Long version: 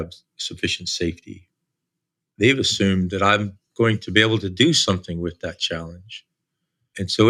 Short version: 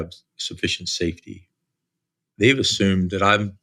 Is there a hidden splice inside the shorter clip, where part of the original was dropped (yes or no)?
no